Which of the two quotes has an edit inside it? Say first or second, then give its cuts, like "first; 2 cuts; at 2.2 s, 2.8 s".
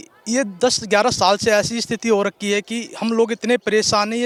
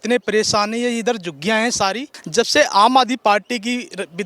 second; 1 cut; at 2.2 s